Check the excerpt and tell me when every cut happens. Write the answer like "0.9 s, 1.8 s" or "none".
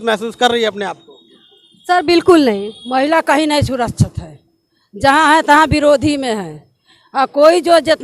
2.7 s

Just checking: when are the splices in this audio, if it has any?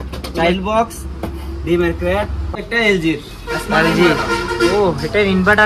2.5 s

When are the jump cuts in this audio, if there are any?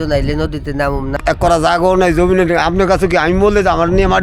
1.2 s

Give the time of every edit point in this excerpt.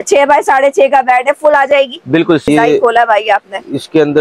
2.4 s

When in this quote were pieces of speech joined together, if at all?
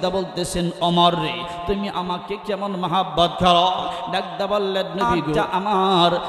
5.4 s

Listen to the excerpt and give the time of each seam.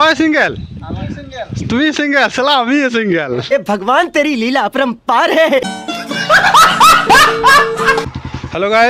3.5 s, 5.8 s, 8.1 s

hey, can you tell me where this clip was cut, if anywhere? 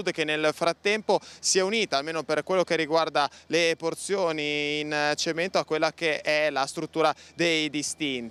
none

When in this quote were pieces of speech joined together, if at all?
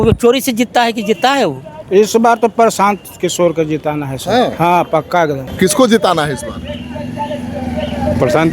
1.7 s, 5.4 s

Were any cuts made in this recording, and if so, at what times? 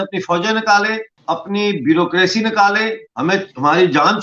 1.1 s, 3.0 s

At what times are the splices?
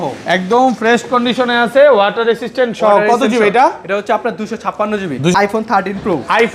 5.3 s

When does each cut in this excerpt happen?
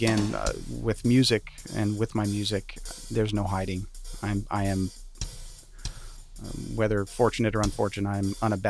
none

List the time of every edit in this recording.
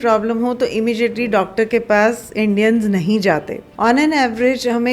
3.6 s

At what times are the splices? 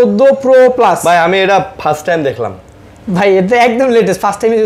none

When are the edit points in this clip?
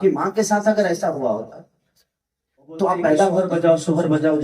3.4 s

